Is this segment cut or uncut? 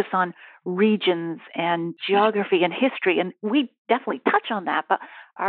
uncut